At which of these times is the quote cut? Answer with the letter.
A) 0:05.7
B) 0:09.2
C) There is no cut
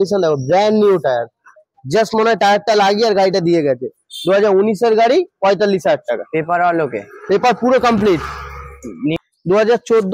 B